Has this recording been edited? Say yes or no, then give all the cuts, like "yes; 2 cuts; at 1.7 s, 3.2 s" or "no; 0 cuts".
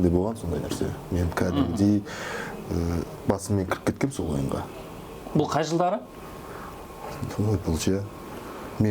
no; 0 cuts